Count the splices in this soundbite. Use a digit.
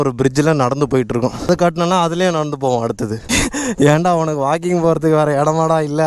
1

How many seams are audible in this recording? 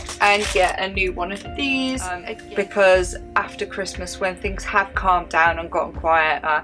1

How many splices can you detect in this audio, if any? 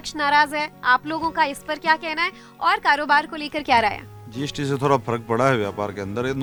0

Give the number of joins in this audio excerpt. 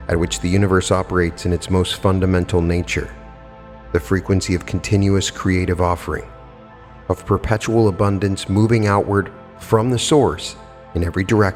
0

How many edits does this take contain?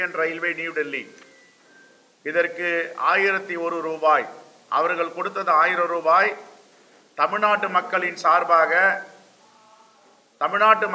0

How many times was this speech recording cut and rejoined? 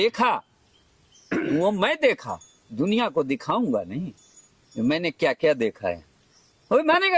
0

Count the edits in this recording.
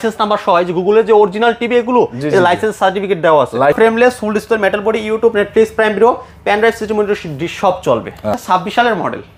2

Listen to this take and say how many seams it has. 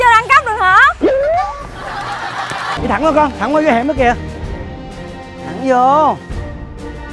1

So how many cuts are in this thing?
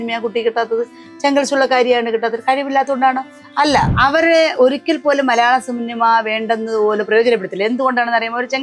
1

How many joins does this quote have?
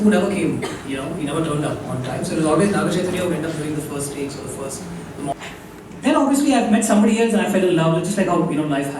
1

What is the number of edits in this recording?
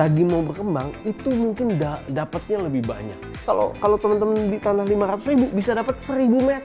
1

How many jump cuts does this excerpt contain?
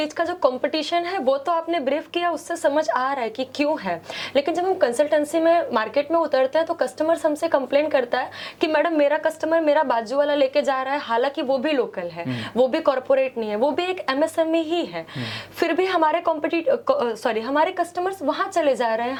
0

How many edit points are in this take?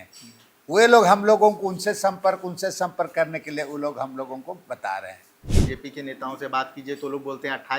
1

